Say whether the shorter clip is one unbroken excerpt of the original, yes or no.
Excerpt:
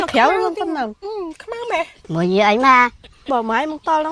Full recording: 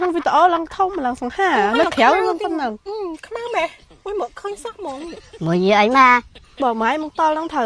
no